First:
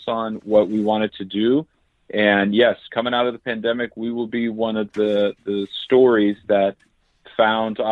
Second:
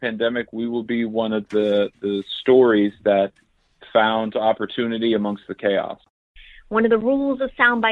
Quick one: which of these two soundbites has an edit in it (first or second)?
second